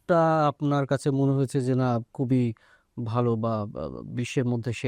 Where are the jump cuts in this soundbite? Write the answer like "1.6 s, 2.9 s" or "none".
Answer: none

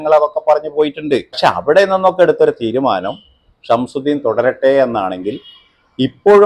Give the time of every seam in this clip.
1.5 s

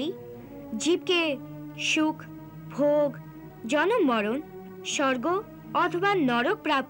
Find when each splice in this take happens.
none

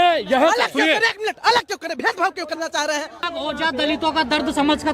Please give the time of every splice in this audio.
3.3 s

